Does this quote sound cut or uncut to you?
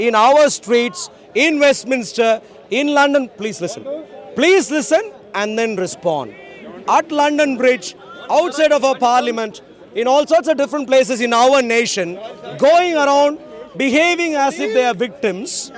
uncut